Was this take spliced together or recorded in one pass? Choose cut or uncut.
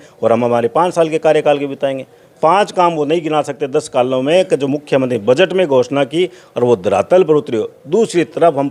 uncut